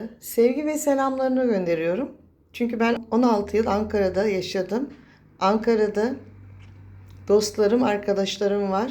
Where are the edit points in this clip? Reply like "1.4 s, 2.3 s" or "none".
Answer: 3.0 s